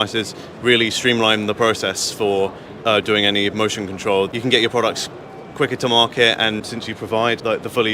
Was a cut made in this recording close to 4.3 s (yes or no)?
yes